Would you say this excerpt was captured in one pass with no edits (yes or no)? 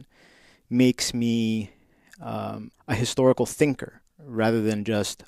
no